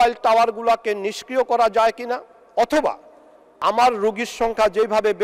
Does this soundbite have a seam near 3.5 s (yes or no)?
yes